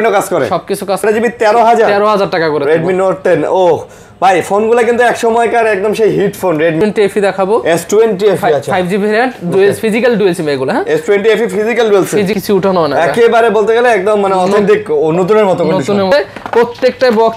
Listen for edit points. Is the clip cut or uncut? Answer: cut